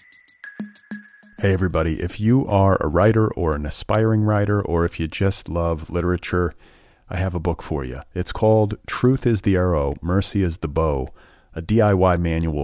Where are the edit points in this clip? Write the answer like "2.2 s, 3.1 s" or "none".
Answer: 1.0 s